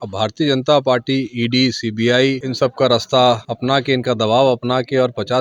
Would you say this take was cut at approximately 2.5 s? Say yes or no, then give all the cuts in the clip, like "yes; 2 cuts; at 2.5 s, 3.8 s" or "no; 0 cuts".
yes; 2 cuts; at 2.5 s, 3.5 s